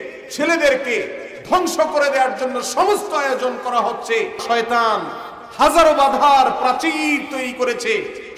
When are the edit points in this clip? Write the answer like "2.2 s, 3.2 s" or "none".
4.4 s